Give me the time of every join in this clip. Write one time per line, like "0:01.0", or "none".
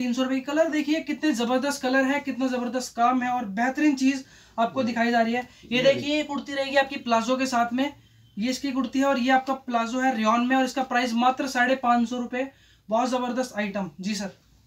none

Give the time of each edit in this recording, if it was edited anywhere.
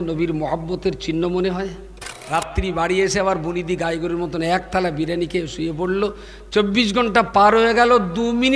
0:02.2

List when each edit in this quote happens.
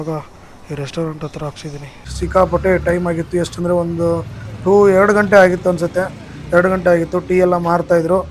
0:02.2

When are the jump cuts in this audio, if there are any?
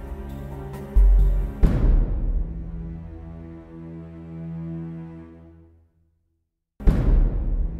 0:06.8

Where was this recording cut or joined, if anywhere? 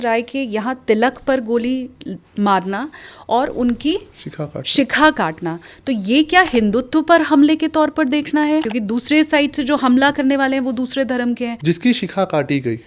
0:08.7
0:11.6

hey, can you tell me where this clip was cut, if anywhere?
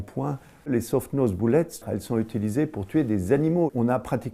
0:01.8
0:03.7

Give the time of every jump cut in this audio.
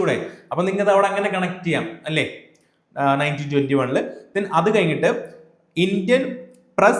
none

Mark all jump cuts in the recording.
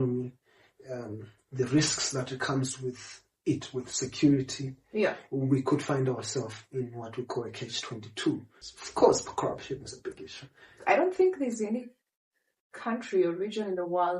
0:08.6
0:10.7

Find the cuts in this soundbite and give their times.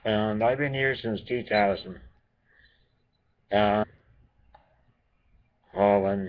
none

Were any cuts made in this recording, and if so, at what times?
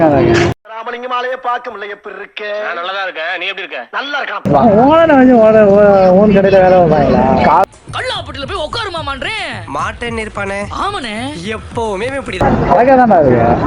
0:04.4
0:12.4

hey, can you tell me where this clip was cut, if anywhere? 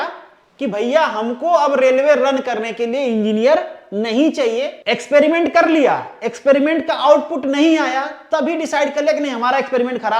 0:04.8

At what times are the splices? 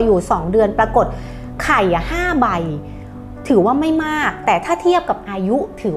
none

